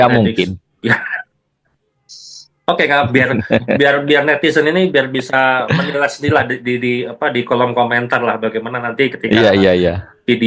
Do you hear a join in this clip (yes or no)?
no